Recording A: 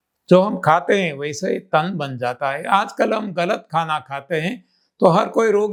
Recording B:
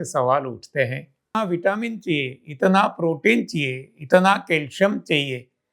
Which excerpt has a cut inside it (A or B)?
B